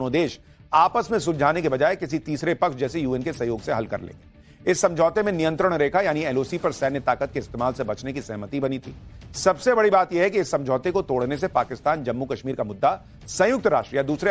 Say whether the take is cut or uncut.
cut